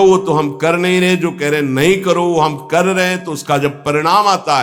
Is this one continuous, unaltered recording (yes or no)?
yes